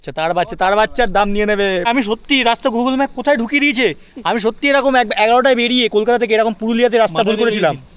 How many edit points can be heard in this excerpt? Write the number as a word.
one